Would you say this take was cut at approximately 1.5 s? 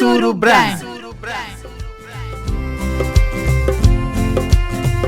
yes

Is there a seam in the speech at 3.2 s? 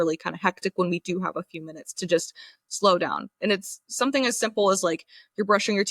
no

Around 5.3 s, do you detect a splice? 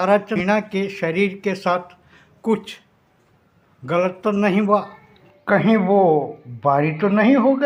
no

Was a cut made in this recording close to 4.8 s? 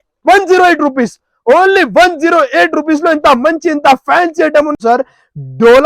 yes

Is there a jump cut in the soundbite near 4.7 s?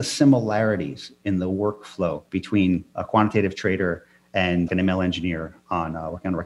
yes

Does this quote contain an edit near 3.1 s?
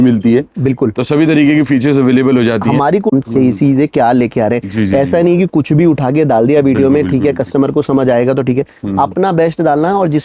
yes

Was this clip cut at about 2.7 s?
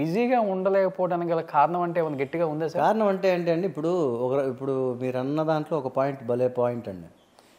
no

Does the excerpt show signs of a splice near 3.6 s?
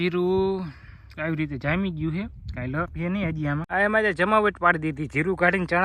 yes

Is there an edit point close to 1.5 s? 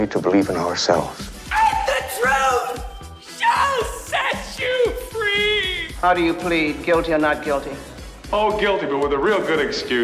no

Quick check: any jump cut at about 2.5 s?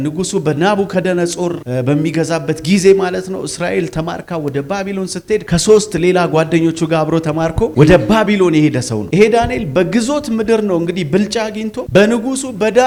no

